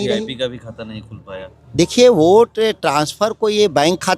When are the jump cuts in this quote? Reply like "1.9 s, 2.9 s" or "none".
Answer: 1.5 s